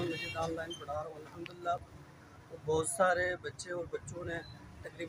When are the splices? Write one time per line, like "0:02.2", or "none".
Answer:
none